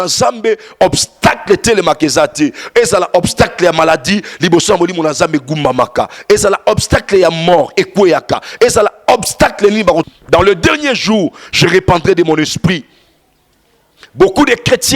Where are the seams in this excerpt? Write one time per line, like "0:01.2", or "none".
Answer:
none